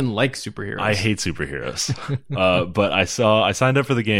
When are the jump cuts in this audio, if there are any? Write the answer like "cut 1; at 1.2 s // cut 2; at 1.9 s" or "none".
none